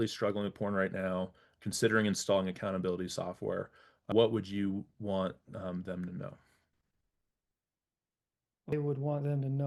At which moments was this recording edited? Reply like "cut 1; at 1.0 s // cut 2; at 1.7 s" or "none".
cut 1; at 4.1 s // cut 2; at 8.7 s